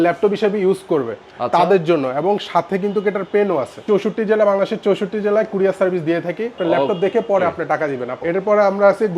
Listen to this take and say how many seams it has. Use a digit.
3